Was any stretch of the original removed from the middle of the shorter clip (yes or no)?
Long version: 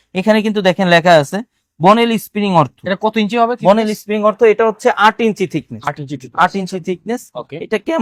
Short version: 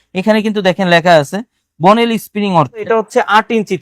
yes